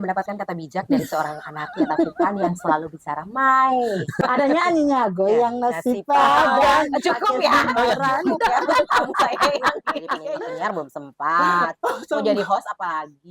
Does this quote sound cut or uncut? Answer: cut